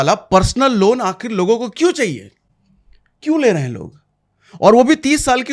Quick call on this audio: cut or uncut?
uncut